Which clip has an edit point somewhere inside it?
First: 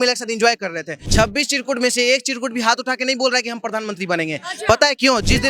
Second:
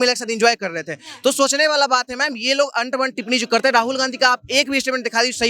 first; 1 cut; at 1.0 s

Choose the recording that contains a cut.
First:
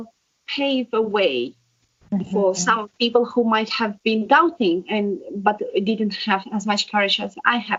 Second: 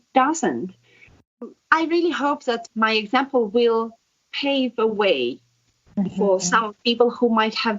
second; 2 cuts; at 1.3 s, 2.7 s

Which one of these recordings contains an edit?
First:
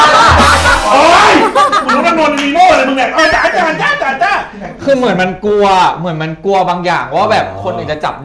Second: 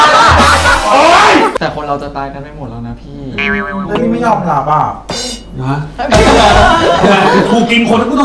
second; 1 cut; at 1.5 s

